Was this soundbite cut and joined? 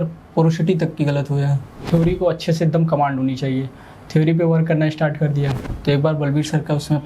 yes; 2 cuts; at 1.8 s, 5.7 s

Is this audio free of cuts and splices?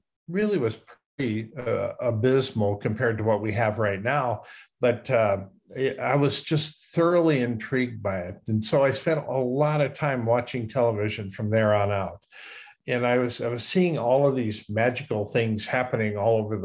yes; 0 cuts

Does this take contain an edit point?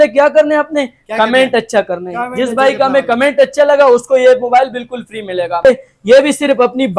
yes; 1 cut; at 5.6 s

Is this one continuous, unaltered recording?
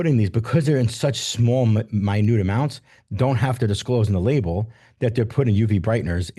yes; 0 cuts

